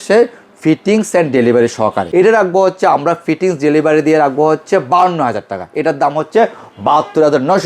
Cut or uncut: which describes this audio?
cut